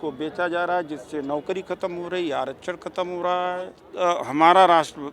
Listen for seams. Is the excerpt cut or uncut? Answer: cut